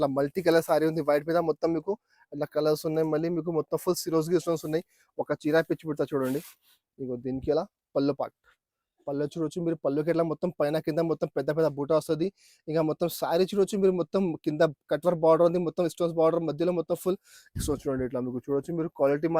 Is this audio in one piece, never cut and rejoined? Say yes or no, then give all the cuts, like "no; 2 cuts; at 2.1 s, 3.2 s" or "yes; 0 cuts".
yes; 0 cuts